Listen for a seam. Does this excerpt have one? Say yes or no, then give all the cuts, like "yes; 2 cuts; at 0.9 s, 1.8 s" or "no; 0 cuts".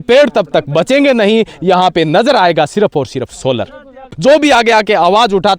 yes; 1 cut; at 4.1 s